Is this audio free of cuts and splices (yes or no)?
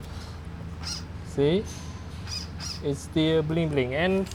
yes